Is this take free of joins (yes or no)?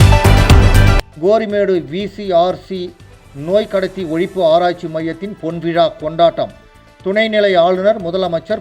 no